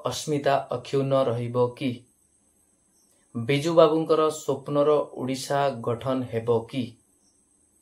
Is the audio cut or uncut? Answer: uncut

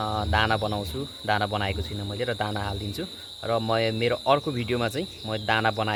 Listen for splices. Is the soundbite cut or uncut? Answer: uncut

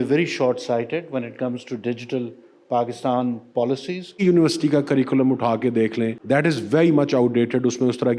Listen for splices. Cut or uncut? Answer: cut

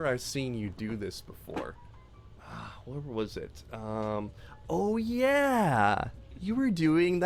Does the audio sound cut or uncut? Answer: uncut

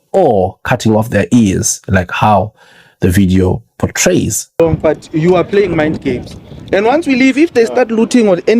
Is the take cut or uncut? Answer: cut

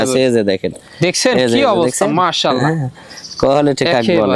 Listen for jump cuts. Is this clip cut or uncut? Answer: uncut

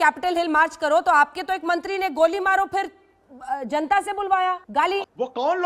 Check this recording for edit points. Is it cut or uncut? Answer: cut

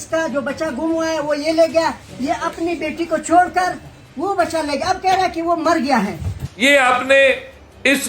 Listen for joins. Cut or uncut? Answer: cut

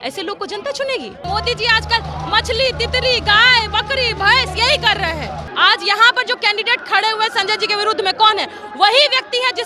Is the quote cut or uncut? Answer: cut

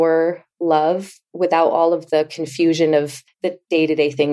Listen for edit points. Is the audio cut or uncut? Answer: cut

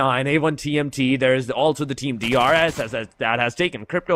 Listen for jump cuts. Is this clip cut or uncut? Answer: uncut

